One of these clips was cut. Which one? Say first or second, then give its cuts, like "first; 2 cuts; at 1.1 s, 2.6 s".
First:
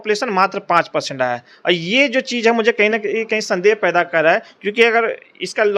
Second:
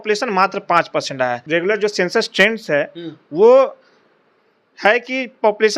second; 1 cut; at 1.4 s